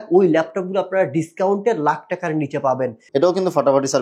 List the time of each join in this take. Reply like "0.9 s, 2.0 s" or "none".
3.0 s